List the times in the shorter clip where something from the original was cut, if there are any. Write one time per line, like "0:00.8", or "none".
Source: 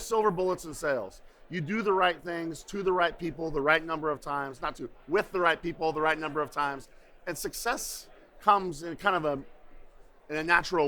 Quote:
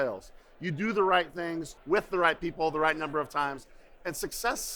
0:01.7